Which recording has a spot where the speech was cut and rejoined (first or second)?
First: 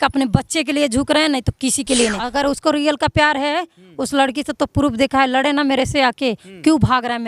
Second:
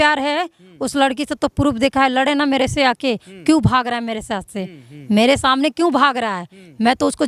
first